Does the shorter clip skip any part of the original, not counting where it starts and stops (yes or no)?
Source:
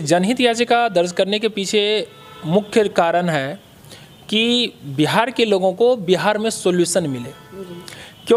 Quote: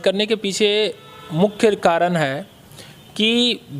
no